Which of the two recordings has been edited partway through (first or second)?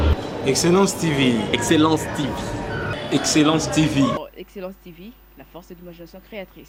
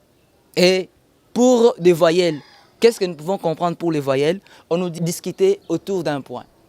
second